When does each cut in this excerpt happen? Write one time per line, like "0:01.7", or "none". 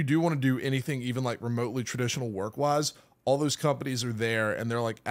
none